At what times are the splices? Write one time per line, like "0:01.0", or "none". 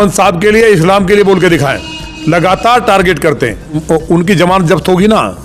0:03.8